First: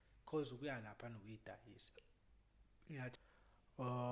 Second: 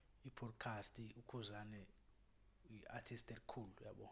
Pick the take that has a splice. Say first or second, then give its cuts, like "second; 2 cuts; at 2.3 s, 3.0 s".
first; 1 cut; at 3.1 s